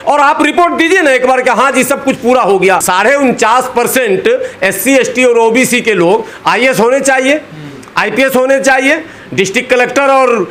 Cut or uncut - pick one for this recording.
uncut